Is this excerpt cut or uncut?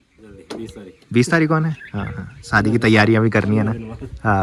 uncut